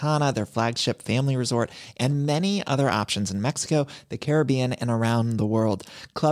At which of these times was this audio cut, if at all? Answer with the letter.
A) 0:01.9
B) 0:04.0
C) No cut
C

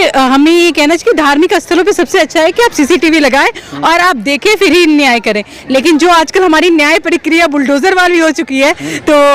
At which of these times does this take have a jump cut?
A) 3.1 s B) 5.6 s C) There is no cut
C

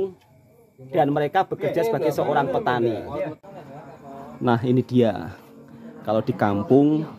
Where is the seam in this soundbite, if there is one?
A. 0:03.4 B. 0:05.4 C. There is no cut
A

